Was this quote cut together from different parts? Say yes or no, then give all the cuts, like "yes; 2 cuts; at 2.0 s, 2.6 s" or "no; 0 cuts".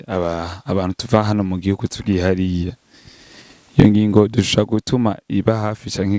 no; 0 cuts